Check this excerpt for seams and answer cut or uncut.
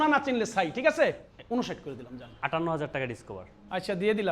cut